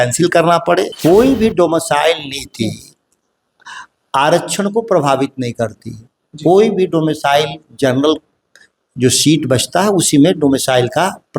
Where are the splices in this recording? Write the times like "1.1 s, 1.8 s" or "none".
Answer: 0.9 s